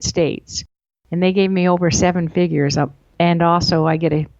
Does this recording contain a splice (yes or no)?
yes